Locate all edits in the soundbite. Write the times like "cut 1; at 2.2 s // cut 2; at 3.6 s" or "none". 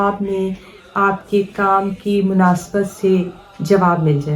none